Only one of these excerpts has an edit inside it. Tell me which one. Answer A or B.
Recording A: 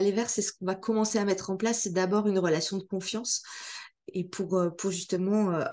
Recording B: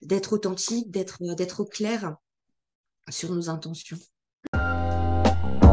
B